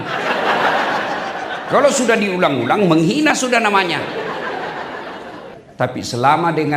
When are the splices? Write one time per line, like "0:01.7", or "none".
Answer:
0:05.6